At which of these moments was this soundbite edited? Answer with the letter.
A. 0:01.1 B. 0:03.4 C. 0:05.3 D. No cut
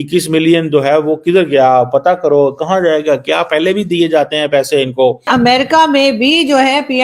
C